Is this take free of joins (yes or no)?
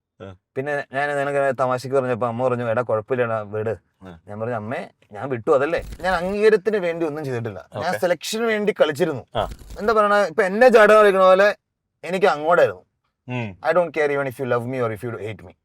no